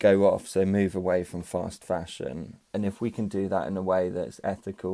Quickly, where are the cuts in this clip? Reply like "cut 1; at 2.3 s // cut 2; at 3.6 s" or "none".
cut 1; at 2.6 s